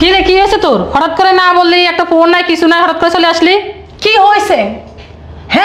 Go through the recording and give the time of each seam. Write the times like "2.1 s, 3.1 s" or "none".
none